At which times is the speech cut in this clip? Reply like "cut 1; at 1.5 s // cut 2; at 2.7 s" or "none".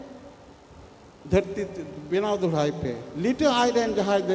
cut 1; at 3.1 s

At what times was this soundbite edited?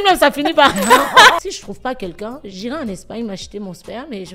cut 1; at 1.4 s

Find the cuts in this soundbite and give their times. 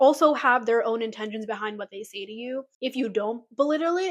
cut 1; at 2.7 s

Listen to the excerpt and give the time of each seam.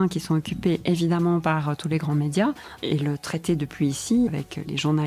cut 1; at 2.7 s // cut 2; at 4.3 s

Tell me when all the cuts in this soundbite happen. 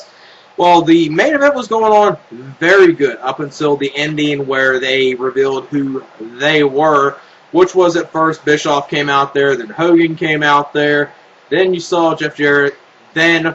none

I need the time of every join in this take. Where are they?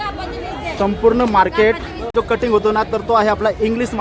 cut 1; at 2.0 s

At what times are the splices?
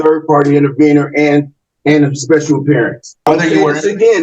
cut 1; at 3.3 s

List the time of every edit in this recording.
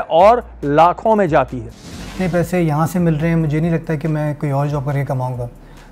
cut 1; at 2.1 s

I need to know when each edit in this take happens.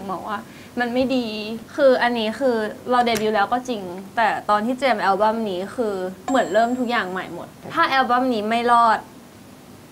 cut 1; at 1.6 s

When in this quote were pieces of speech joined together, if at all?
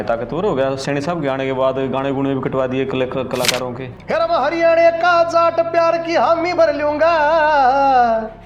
cut 1; at 3.8 s

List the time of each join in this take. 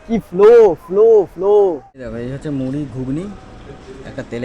cut 1; at 2.1 s

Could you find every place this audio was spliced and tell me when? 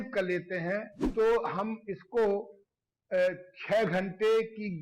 cut 1; at 1.0 s

